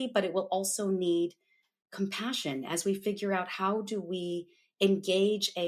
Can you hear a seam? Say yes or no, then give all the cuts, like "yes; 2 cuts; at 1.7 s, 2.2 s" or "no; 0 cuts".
no; 0 cuts